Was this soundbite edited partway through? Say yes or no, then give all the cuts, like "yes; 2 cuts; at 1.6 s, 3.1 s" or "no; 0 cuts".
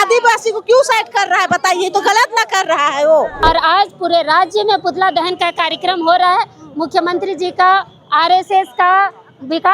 yes; 1 cut; at 3.3 s